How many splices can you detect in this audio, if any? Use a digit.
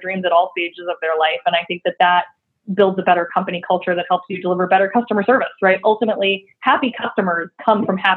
1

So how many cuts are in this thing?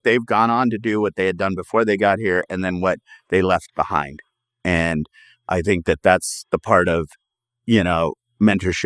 0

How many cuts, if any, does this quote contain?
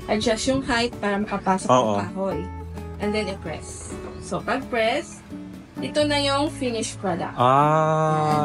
0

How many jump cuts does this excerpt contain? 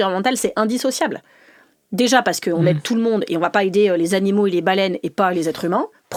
0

